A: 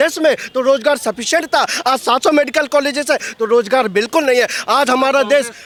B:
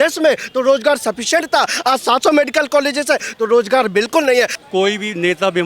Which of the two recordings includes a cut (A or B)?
B